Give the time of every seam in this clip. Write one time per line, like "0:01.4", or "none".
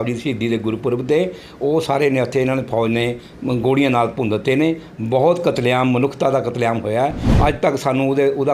0:07.2